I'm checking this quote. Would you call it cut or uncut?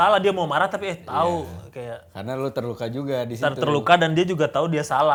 uncut